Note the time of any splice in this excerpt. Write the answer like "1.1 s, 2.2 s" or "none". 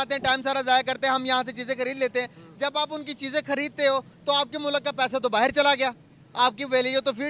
none